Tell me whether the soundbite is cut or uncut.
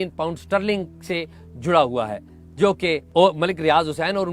cut